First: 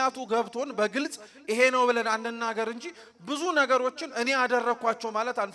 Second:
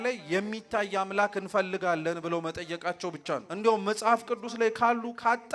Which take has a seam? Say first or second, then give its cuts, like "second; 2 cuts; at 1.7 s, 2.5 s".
second; 1 cut; at 3.5 s